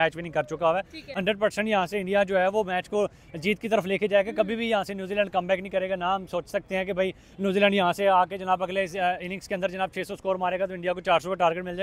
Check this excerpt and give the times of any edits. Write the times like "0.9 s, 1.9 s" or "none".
none